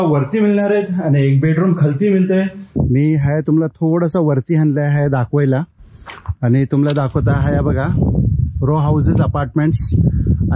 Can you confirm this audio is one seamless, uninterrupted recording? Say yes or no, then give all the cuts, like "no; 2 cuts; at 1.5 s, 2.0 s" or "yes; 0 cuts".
no; 1 cut; at 2.6 s